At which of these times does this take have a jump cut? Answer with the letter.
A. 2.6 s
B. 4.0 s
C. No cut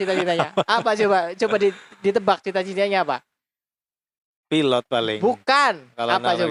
C